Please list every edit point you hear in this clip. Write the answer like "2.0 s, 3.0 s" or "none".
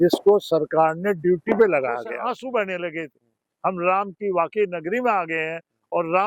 2.1 s